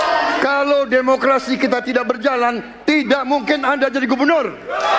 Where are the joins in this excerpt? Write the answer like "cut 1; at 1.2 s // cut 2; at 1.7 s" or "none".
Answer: none